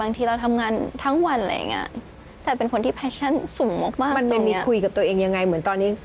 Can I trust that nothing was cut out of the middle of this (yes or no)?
yes